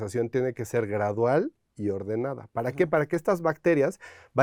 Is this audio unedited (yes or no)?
yes